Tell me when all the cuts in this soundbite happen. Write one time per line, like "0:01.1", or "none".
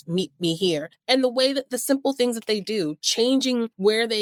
none